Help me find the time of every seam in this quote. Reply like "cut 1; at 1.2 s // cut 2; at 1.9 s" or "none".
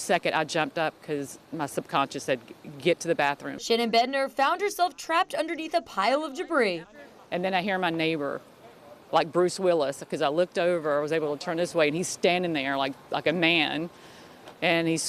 cut 1; at 3.9 s